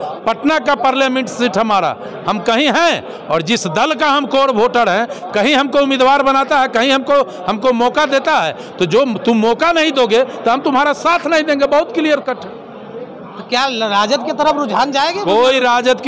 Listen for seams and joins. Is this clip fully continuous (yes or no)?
yes